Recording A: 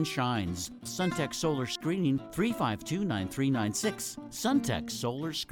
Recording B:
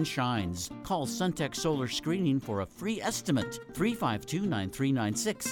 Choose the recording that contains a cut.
A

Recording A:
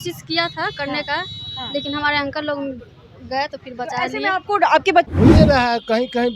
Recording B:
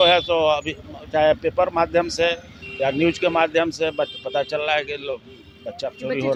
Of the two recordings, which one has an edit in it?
A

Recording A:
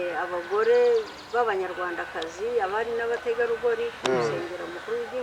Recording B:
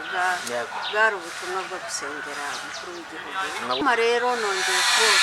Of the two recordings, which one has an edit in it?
B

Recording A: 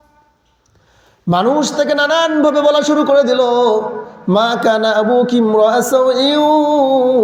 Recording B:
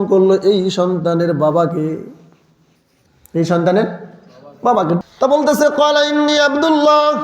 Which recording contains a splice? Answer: B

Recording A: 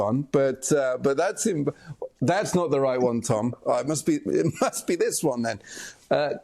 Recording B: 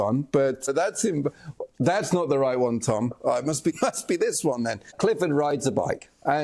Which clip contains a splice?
B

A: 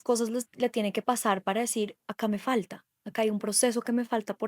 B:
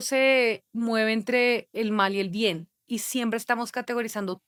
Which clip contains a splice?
A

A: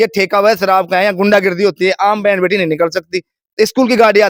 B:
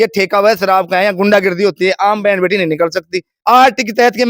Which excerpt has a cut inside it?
B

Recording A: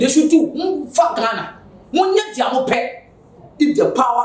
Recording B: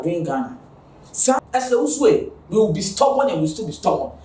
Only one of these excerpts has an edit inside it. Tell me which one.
B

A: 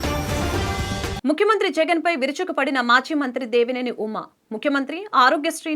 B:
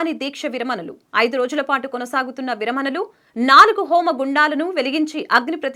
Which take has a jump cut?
A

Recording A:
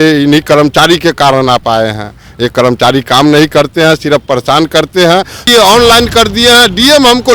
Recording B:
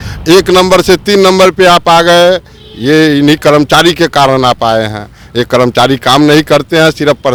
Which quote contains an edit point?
A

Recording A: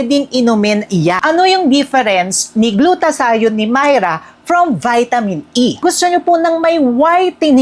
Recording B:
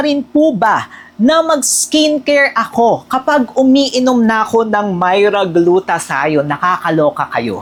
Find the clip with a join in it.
A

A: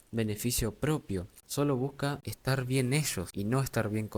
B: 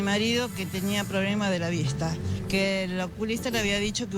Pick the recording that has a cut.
A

